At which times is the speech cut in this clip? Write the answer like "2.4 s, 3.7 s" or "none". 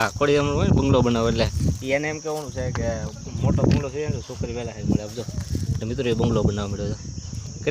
none